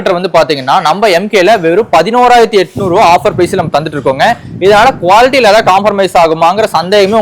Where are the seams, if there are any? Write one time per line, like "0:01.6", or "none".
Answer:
none